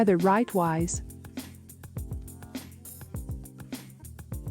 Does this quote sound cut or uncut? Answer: uncut